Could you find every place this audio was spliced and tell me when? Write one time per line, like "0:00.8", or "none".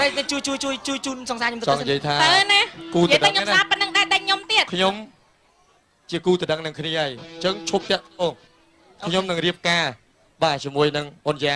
none

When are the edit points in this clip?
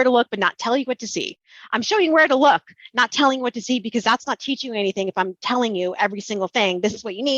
none

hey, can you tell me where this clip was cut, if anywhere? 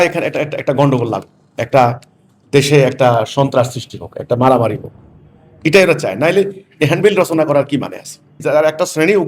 0:08.3

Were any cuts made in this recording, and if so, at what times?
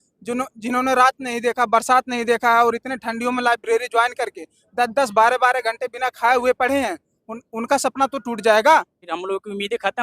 0:09.0

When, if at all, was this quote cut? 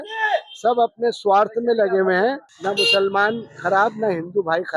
0:02.5

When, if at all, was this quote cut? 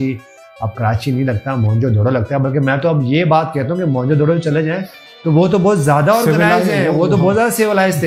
none

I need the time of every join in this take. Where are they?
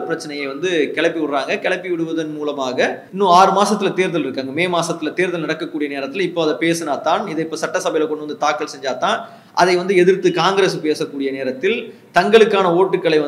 0:03.0

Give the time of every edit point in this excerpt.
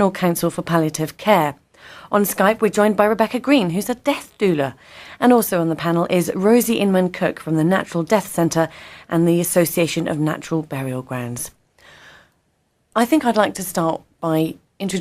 0:01.4

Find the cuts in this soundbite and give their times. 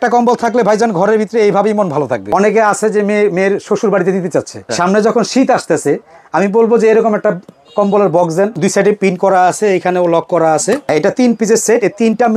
0:02.3
0:04.7
0:08.5
0:10.9

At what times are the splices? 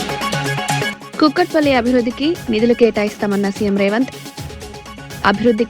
0:01.0

